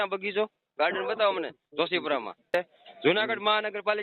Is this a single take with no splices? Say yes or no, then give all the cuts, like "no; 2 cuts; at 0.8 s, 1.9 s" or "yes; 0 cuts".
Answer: no; 1 cut; at 2.5 s